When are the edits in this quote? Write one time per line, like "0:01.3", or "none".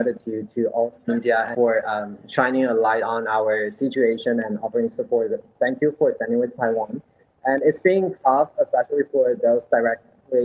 0:01.5